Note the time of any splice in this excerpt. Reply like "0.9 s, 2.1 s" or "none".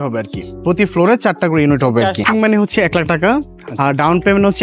2.3 s